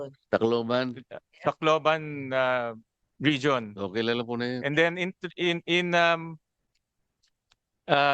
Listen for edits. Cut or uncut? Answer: uncut